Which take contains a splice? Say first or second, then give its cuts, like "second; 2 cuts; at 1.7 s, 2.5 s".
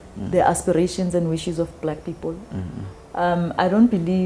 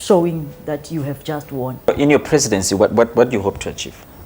second; 1 cut; at 1.9 s